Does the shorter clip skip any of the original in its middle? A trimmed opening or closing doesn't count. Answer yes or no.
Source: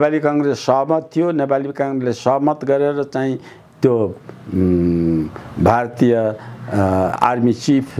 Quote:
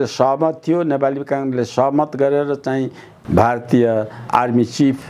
yes